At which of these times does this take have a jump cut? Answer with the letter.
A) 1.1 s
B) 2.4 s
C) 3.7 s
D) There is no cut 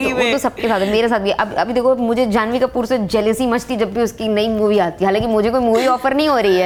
D